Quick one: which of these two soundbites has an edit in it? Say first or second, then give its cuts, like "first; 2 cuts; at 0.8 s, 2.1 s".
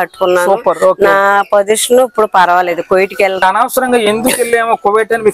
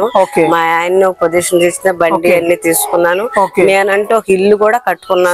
first; 1 cut; at 3.4 s